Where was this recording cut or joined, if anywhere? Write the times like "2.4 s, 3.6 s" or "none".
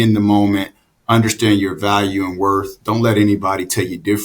none